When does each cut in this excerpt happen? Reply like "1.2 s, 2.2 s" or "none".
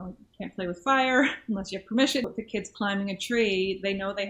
2.2 s